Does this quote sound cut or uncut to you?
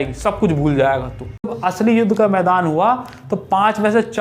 cut